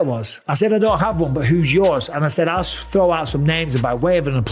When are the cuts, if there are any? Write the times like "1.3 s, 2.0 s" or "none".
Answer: none